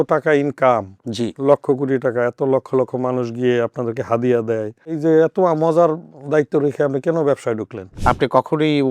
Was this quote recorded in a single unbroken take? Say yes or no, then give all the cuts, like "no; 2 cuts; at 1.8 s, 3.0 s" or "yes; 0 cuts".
no; 2 cuts; at 5.0 s, 7.9 s